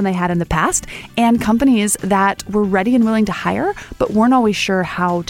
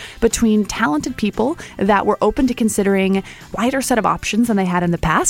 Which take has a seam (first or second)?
second